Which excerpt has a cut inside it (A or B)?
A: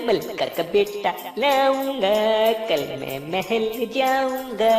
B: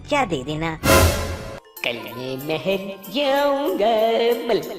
B